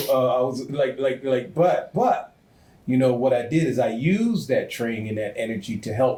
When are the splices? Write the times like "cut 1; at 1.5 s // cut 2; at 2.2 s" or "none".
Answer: none